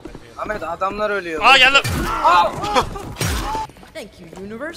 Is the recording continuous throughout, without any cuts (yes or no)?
no